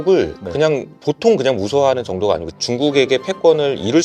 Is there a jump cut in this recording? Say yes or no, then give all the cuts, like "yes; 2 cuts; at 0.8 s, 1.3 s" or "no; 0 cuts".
yes; 2 cuts; at 0.9 s, 2.7 s